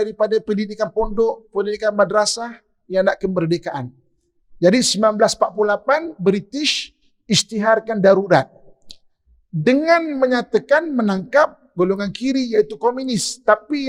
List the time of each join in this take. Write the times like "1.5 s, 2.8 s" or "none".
none

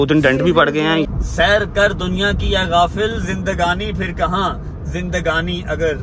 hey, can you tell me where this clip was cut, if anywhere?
1.1 s

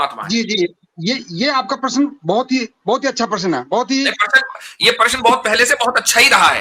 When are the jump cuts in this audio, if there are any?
none

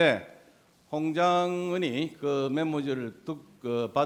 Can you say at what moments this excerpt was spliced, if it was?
none

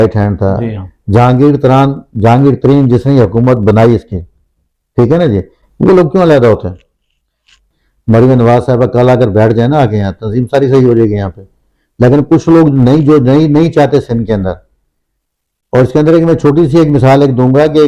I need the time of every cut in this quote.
7.7 s

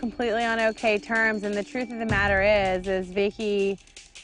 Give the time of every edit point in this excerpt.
none

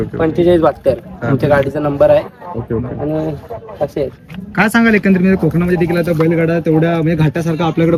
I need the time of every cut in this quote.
none

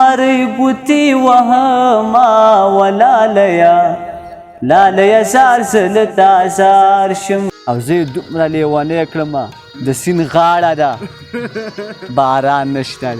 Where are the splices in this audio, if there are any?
7.7 s

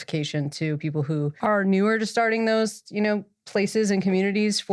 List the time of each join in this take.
1.3 s

